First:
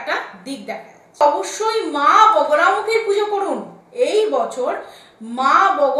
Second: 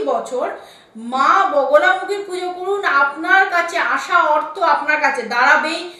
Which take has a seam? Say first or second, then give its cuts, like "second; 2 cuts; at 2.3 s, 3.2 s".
first; 1 cut; at 1.2 s